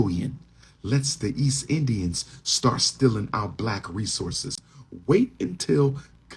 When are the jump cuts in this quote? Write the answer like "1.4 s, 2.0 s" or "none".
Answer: none